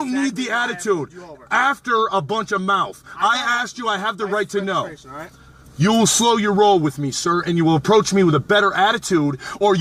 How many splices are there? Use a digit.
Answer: 0